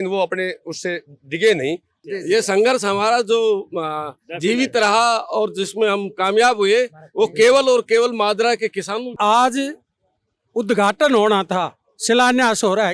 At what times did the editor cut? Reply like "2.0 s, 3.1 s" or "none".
1.9 s, 9.1 s